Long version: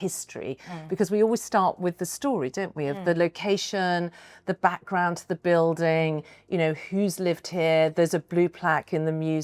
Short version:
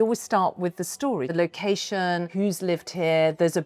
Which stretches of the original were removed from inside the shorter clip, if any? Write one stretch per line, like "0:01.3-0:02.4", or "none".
0:02.5-0:03.1
0:04.1-0:06.8